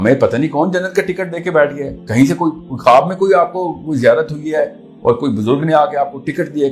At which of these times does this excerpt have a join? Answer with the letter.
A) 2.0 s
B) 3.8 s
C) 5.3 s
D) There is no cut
D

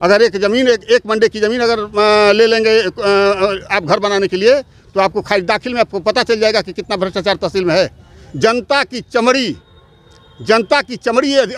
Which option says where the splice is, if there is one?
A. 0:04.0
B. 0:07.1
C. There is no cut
C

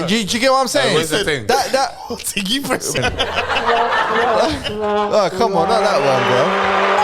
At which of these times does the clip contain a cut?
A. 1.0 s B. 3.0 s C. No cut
B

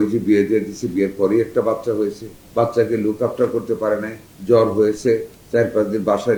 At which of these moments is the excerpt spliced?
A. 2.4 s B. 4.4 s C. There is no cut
C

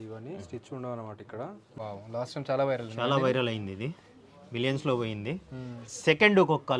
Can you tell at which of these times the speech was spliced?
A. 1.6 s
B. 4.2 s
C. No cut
A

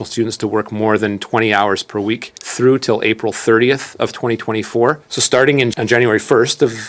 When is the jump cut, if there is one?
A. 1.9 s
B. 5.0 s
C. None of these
B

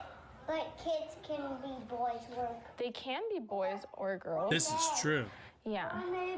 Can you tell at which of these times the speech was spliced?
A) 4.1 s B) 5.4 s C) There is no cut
C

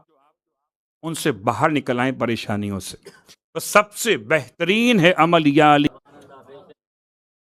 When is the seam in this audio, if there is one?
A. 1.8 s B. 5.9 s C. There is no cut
B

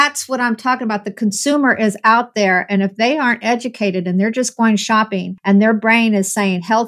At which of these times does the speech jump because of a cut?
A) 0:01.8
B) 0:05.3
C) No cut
B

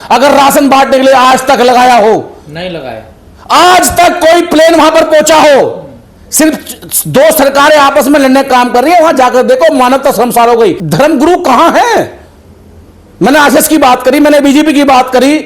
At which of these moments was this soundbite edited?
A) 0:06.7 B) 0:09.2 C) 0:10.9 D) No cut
C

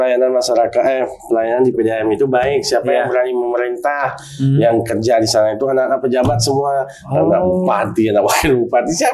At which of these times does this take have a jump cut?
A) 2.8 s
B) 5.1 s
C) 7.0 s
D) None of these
D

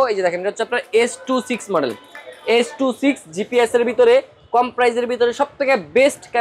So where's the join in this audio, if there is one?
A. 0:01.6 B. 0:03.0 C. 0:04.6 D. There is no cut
D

